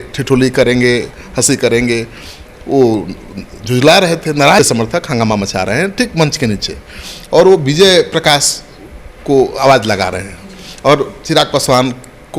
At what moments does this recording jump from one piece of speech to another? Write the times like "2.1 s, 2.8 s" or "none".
4.6 s